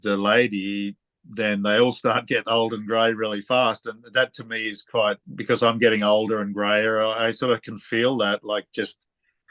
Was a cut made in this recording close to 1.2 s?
no; 1 cut; at 5.2 s

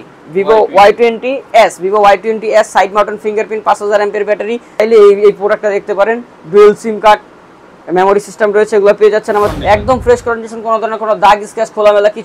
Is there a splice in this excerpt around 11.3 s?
no; 2 cuts; at 4.8 s, 9.6 s

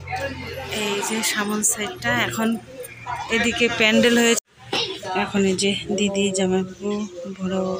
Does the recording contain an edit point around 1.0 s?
no; 1 cut; at 4.4 s

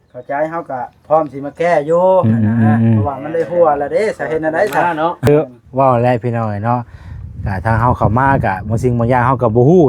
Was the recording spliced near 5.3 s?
yes; 1 cut; at 5.3 s

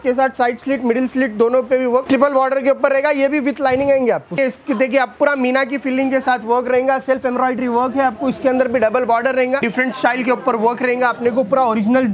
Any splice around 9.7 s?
yes; 3 cuts; at 2.0 s, 4.4 s, 9.7 s

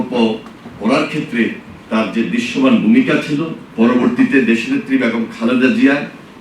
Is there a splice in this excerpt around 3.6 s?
yes; 1 cut; at 3.6 s

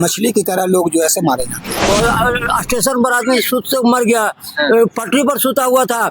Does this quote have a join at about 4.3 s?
no; 1 cut; at 1.9 s

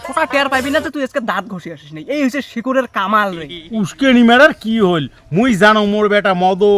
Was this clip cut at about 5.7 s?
no; 1 cut; at 3.5 s

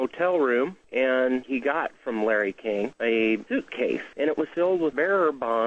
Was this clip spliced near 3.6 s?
yes; 1 cut; at 3.6 s

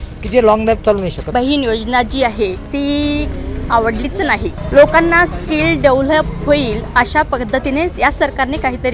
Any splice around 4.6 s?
yes; 3 cuts; at 1.2 s, 2.6 s, 4.6 s

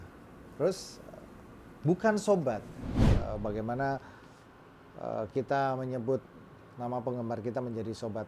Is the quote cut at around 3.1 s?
yes; 1 cut; at 3.1 s

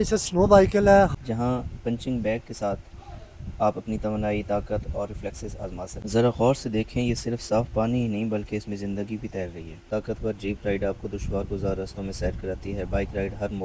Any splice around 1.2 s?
yes; 3 cuts; at 1.2 s, 5.9 s, 9.8 s

